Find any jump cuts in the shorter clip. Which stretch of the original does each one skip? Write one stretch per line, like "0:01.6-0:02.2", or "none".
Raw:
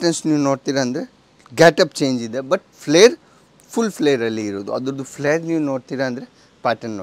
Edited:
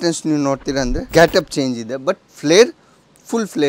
0:01.0-0:01.4

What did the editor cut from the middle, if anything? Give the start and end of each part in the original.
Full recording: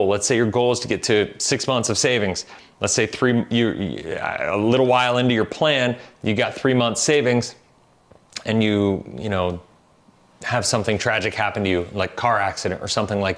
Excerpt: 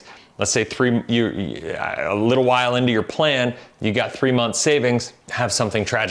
0:07.6-0:10.3

